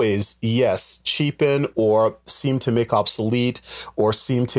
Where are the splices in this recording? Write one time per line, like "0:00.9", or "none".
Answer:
none

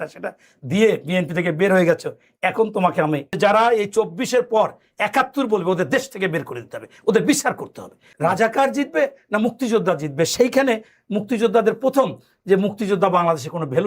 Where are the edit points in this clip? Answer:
0:03.4
0:08.0

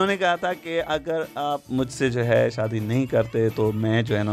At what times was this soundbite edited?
none

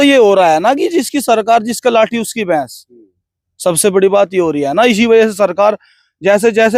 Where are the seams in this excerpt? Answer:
none

